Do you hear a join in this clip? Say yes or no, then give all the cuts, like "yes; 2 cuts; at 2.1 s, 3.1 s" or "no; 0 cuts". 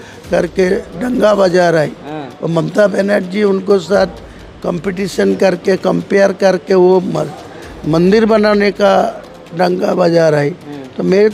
no; 0 cuts